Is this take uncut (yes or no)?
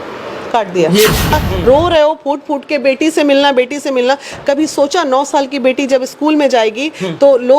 no